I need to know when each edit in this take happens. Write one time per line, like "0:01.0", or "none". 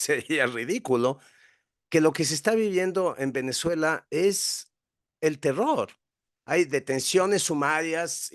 none